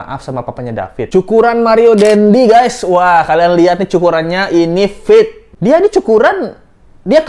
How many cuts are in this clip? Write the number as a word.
two